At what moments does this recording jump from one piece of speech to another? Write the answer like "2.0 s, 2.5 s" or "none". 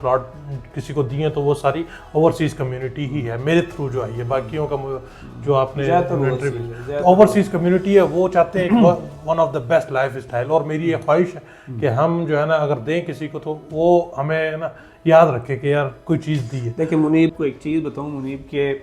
17.4 s